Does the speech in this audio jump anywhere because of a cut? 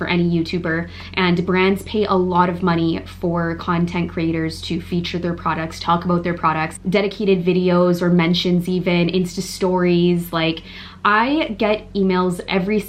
no; 0 cuts

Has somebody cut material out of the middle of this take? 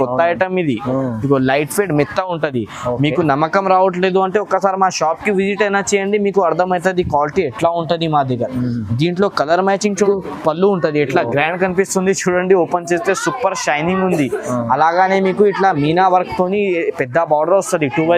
yes; 1 cut; at 10.1 s

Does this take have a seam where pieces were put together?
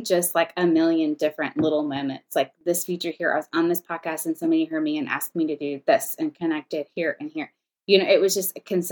no; 0 cuts

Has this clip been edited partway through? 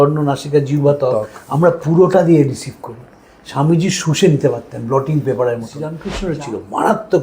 yes; 1 cut; at 6.0 s

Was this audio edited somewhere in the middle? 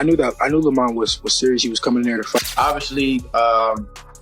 yes; 1 cut; at 2.4 s

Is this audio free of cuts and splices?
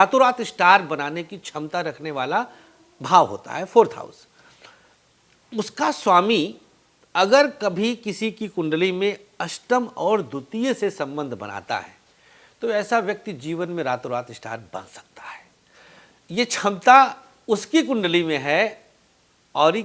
yes; 0 cuts

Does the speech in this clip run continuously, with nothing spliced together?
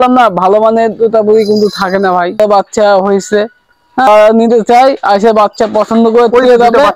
no; 2 cuts; at 2.4 s, 4.1 s

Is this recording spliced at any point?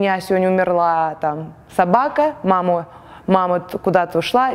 no; 0 cuts

